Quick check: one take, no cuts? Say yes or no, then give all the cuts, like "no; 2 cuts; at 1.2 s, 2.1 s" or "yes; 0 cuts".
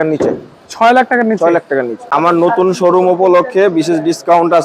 no; 1 cut; at 2.0 s